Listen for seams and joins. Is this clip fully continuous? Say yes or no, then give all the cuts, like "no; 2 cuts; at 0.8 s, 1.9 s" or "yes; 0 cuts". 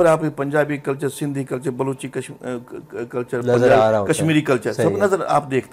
yes; 0 cuts